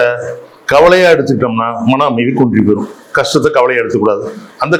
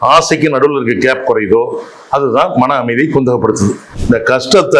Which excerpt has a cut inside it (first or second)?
second